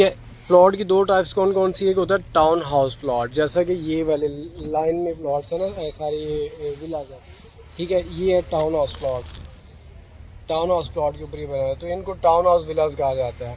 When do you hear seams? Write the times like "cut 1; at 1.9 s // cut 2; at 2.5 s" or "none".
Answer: none